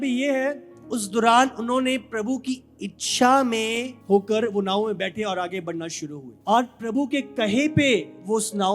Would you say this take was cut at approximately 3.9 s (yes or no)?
yes